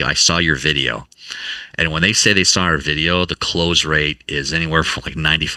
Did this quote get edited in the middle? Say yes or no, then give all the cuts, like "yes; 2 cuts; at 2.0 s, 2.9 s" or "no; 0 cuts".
no; 0 cuts